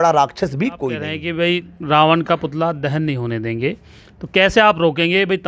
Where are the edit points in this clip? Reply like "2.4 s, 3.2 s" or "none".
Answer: 1.2 s